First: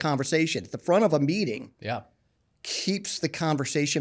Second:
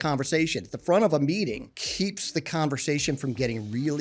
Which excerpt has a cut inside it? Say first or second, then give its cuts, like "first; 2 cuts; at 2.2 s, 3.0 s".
second; 1 cut; at 1.7 s